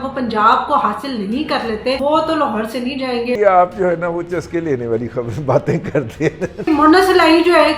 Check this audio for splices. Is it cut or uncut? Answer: cut